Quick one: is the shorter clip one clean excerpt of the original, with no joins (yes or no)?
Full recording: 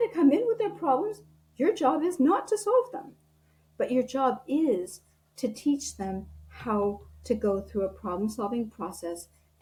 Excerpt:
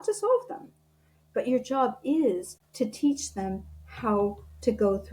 no